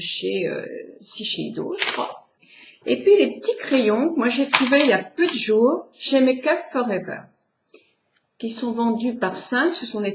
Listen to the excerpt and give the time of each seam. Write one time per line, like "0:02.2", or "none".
0:03.2